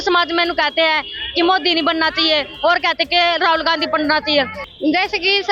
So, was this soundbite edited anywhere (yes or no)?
yes